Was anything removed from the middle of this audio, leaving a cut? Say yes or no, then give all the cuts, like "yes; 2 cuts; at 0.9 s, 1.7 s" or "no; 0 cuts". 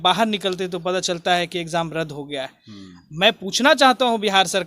no; 0 cuts